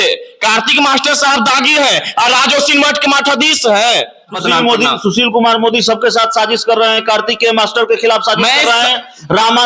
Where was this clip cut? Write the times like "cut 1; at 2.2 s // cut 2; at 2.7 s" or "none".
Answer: cut 1; at 4.4 s